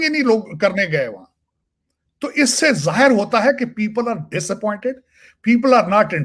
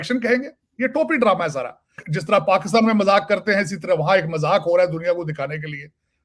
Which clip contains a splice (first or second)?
second